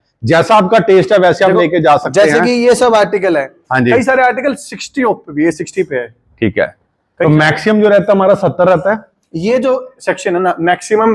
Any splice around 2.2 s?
no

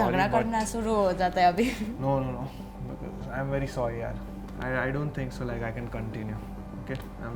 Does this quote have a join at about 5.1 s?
no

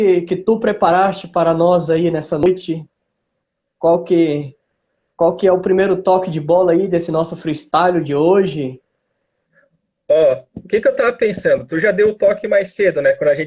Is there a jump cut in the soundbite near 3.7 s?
no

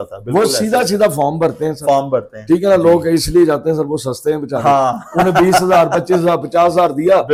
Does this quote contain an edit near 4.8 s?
no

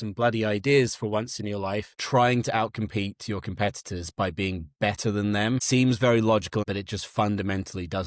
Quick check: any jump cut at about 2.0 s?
yes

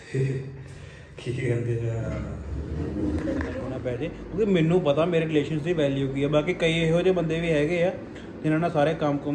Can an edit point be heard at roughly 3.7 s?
yes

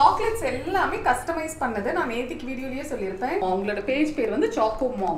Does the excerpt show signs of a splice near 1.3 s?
no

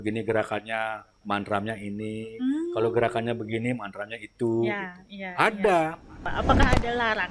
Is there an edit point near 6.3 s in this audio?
yes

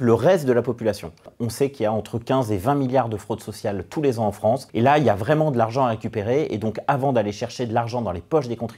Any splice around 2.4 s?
no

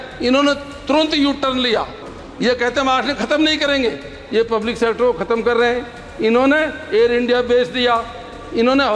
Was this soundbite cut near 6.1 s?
no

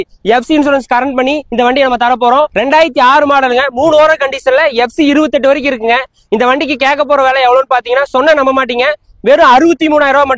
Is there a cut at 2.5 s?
yes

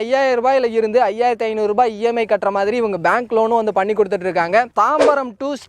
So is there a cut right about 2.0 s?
no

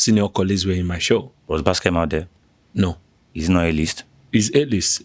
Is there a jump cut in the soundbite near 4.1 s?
no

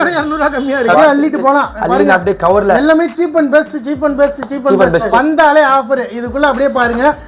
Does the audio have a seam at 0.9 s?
yes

